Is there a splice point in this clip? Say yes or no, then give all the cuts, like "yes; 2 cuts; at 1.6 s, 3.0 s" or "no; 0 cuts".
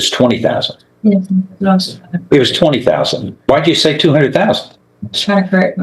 no; 0 cuts